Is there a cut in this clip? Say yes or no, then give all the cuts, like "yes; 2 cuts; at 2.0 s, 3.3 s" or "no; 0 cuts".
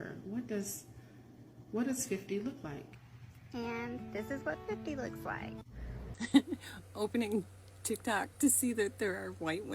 yes; 1 cut; at 6.1 s